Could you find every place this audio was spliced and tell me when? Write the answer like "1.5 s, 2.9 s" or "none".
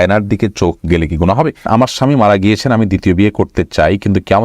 1.7 s